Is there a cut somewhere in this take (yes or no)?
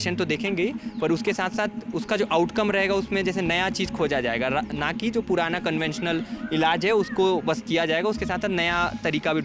no